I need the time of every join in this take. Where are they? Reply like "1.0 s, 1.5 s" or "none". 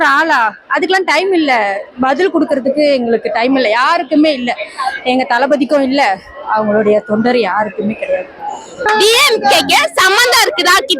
8.8 s